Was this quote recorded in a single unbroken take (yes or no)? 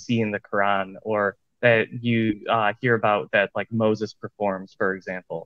yes